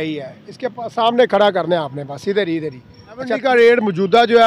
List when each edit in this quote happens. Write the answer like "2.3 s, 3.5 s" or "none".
3.3 s

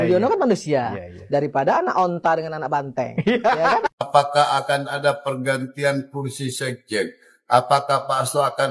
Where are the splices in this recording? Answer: 3.9 s

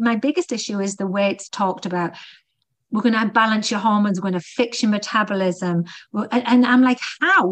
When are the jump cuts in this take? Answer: 1.5 s

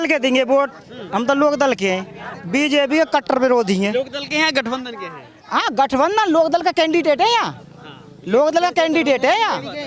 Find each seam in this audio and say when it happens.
none

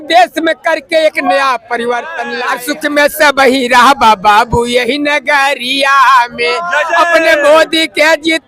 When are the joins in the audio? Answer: 2.3 s

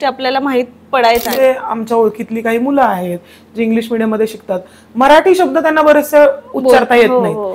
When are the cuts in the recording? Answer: 1.3 s

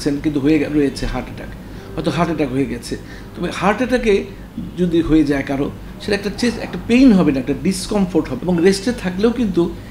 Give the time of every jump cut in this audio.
8.3 s

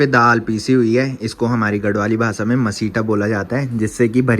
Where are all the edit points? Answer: none

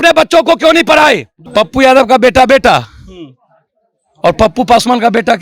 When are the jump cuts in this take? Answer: 1.3 s

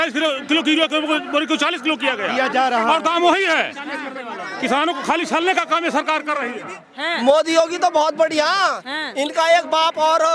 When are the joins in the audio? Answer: none

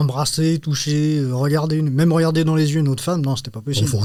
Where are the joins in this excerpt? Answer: none

